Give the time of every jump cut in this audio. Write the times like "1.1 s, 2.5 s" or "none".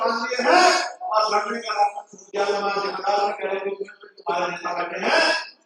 none